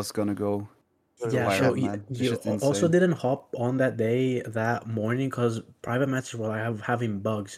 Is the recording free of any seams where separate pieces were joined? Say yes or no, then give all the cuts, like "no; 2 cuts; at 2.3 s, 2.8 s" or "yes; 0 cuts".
yes; 0 cuts